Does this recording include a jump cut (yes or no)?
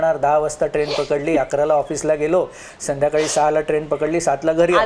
no